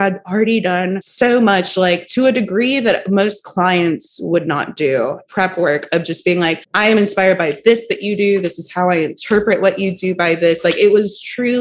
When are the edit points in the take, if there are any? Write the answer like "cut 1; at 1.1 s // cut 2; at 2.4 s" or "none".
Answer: cut 1; at 1.0 s // cut 2; at 5.2 s // cut 3; at 6.7 s